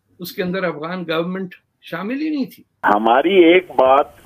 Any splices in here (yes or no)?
yes